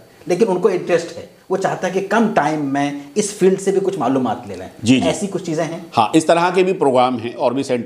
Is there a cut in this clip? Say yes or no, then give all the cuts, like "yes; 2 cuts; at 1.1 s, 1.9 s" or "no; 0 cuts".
no; 0 cuts